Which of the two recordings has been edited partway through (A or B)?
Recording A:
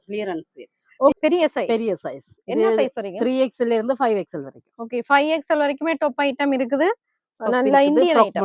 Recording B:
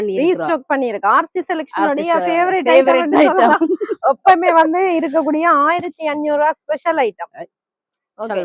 A